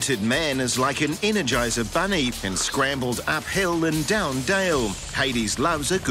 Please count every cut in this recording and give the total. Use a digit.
0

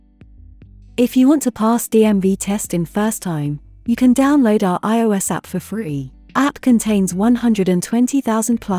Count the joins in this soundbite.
1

